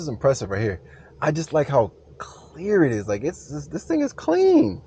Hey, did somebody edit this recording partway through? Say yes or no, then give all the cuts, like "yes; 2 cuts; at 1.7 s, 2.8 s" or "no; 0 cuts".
no; 0 cuts